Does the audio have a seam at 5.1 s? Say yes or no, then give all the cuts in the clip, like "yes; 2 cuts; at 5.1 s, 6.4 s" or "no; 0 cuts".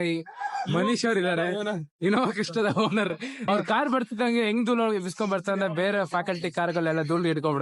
no; 1 cut; at 3.5 s